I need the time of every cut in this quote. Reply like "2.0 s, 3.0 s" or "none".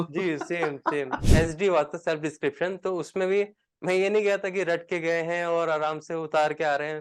1.2 s

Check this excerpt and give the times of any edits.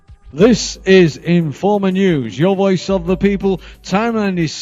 none

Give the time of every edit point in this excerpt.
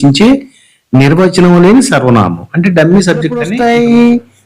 3.5 s

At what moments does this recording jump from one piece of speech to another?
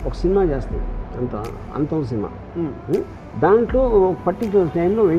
3.2 s

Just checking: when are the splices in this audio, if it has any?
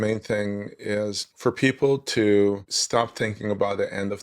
1.2 s, 2.7 s

